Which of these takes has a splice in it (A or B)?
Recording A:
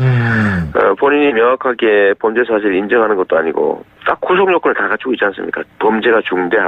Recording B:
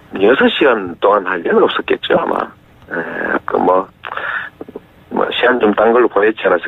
A